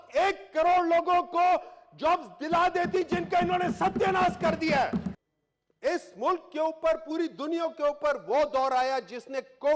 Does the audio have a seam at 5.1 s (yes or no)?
yes